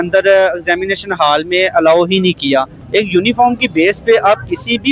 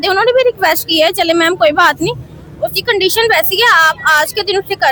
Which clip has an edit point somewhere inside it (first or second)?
first